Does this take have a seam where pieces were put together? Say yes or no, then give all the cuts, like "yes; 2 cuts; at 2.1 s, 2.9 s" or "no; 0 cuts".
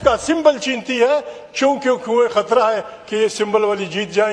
no; 0 cuts